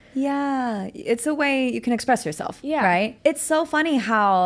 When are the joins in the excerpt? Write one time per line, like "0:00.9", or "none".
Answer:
0:03.1